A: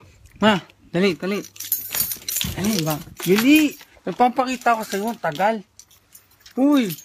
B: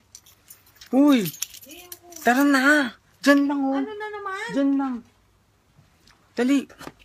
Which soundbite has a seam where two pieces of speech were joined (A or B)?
A